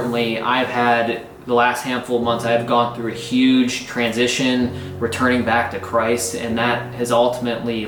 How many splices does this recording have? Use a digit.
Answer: 0